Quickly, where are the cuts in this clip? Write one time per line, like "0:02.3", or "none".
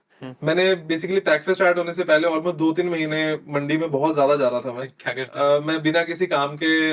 none